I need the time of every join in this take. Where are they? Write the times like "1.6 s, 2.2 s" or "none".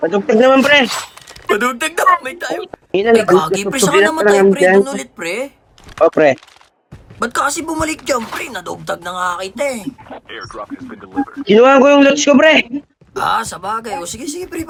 none